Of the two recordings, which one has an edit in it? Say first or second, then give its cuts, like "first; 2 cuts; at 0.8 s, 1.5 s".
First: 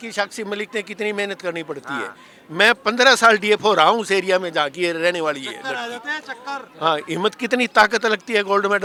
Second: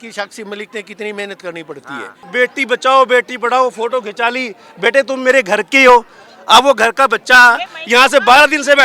second; 1 cut; at 2.2 s